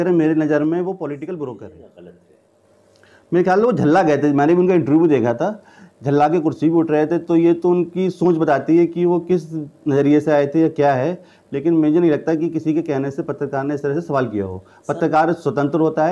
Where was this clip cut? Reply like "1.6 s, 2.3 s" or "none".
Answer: 1.7 s